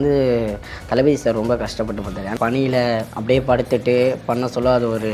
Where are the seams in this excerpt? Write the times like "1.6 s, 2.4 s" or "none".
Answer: 2.3 s, 3.1 s